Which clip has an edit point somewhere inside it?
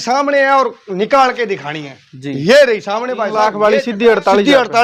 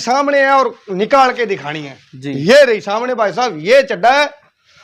first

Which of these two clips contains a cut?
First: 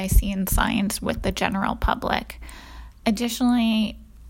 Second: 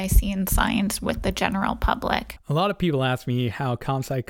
second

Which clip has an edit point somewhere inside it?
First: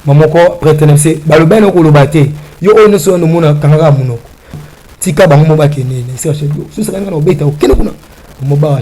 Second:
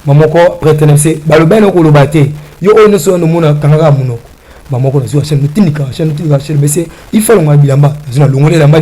first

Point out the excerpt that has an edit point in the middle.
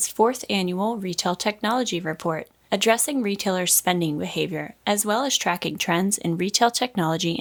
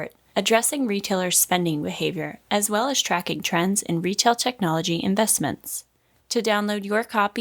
second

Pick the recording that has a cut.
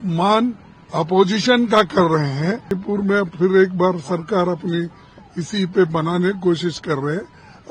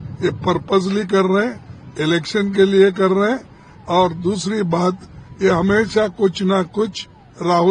first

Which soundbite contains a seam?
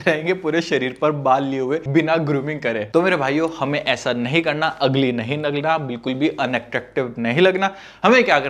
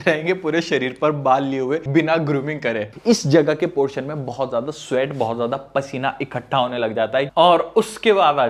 second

